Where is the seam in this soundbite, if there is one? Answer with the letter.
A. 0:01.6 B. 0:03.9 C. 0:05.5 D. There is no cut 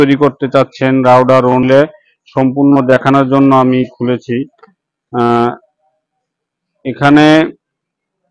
A